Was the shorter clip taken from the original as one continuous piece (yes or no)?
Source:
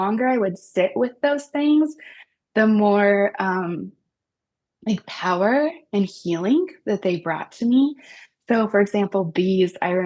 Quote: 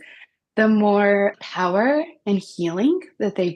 no